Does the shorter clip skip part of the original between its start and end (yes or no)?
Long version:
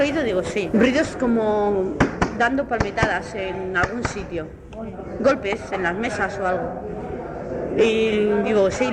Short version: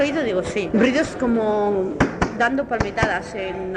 no